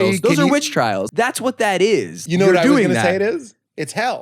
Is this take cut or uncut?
cut